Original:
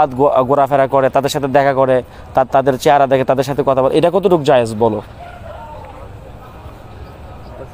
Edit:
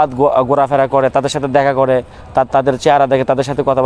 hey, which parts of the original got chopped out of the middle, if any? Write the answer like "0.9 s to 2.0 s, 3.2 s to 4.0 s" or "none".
none